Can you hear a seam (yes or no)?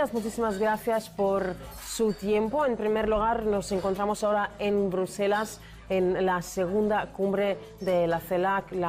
no